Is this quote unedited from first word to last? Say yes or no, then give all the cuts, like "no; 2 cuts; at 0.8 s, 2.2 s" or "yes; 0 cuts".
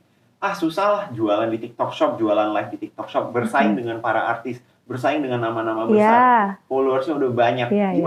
yes; 0 cuts